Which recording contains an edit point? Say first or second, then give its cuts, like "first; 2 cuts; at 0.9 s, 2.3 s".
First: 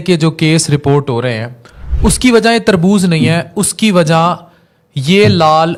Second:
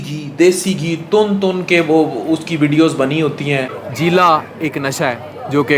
second; 1 cut; at 3.8 s